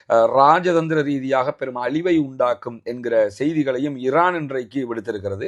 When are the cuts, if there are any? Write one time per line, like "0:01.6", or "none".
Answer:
none